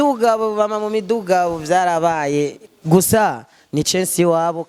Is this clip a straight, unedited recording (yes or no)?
yes